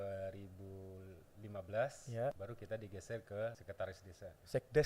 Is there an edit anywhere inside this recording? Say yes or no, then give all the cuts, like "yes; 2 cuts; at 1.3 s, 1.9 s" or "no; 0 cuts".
yes; 2 cuts; at 2.4 s, 3.6 s